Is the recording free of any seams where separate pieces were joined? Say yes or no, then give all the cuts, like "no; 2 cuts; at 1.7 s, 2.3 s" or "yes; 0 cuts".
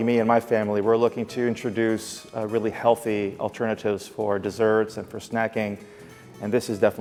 yes; 0 cuts